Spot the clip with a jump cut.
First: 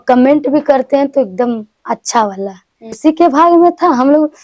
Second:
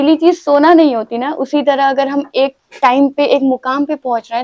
first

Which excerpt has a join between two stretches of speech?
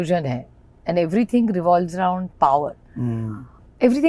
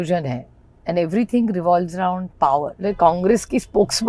second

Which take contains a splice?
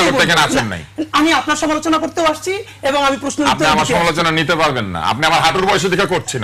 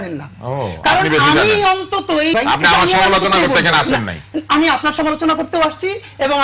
second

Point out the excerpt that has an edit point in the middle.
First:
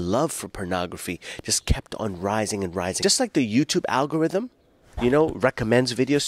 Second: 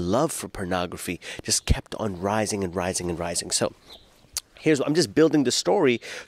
first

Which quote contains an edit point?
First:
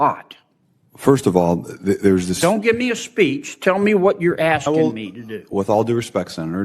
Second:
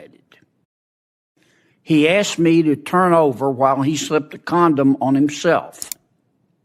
first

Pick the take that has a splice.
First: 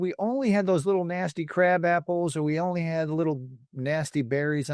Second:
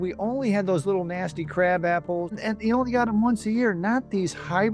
second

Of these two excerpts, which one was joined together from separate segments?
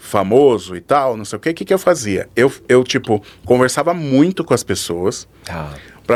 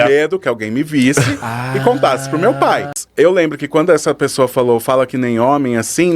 second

